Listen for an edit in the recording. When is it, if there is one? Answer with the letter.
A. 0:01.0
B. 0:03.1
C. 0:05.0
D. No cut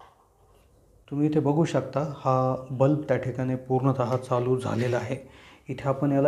A